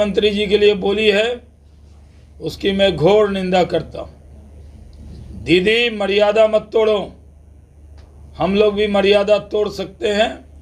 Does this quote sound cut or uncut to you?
uncut